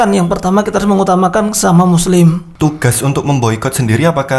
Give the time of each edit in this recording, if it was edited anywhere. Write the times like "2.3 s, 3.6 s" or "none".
2.5 s